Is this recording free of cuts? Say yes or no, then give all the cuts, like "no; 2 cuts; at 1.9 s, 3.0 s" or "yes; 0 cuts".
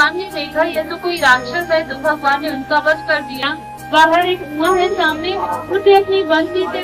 no; 1 cut; at 3.4 s